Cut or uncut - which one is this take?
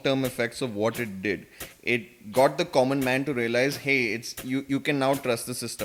uncut